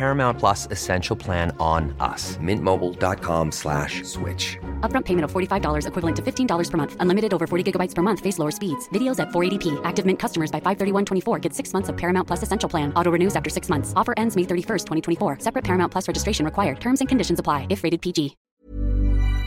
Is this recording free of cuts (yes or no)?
no